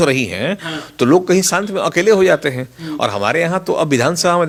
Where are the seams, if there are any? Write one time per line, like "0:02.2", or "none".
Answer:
none